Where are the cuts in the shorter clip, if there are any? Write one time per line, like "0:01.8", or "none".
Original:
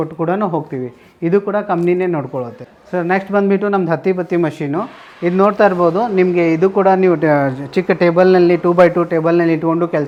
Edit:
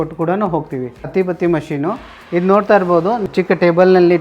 0:01.1
0:03.2